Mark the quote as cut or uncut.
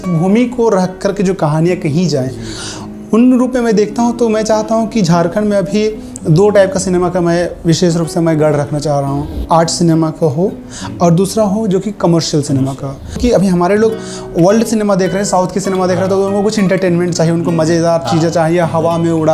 cut